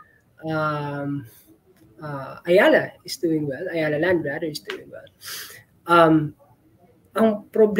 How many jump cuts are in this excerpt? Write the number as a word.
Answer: zero